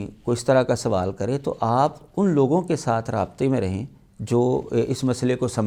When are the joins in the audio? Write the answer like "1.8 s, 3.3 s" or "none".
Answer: none